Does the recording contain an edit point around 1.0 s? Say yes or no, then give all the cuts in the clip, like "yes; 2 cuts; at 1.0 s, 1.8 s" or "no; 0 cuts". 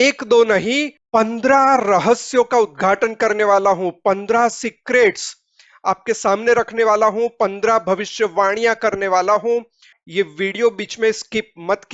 yes; 1 cut; at 1.0 s